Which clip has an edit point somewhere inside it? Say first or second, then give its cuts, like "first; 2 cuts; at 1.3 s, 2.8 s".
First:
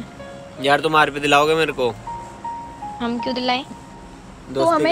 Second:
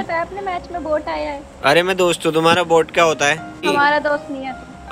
second; 1 cut; at 3.6 s